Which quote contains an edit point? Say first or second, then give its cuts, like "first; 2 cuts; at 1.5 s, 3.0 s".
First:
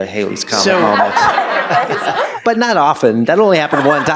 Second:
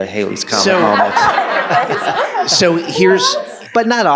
first; 1 cut; at 2.3 s